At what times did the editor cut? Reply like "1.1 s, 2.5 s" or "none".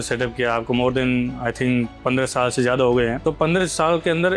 3.2 s